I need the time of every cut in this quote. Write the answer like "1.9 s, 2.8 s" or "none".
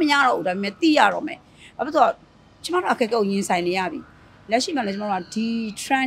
none